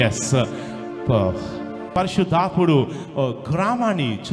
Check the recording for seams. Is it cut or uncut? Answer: cut